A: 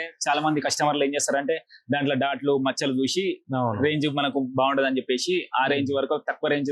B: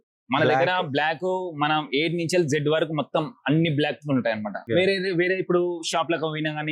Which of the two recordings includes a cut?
B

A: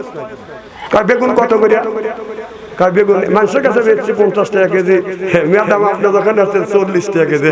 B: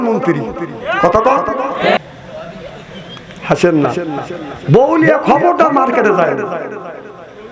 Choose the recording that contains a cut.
B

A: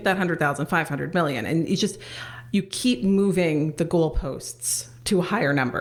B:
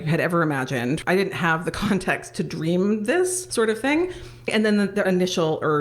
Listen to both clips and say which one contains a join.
B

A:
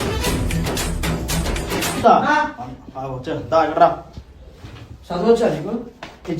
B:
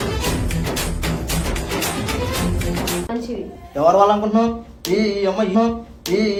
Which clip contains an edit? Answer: A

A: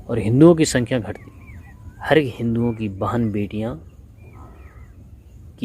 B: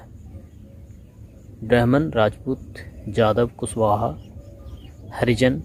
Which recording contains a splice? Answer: A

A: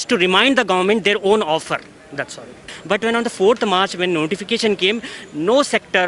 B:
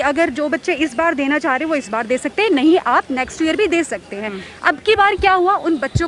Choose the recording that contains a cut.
A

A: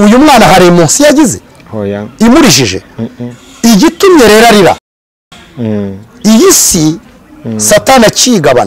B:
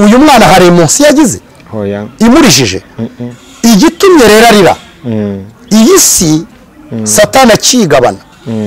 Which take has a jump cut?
B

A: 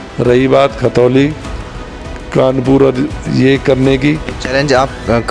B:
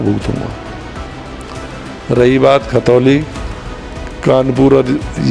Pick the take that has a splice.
A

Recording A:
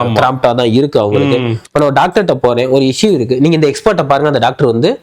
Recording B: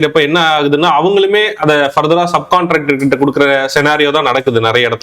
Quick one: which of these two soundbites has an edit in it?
A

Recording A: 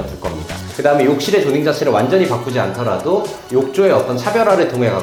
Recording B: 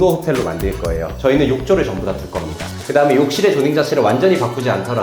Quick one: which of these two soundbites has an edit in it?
B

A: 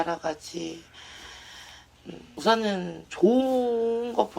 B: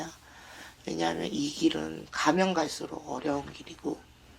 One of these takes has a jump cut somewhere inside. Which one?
A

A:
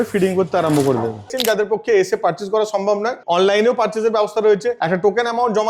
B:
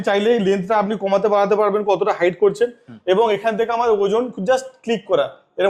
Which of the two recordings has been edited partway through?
A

